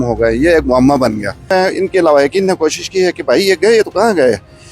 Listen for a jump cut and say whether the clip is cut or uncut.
cut